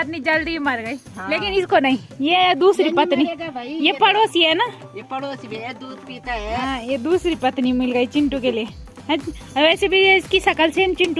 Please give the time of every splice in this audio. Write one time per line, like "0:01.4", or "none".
none